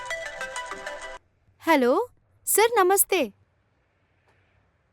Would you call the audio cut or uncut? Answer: cut